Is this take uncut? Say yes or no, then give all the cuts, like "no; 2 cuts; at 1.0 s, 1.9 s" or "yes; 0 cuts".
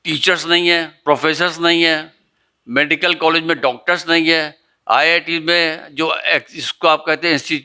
no; 1 cut; at 0.9 s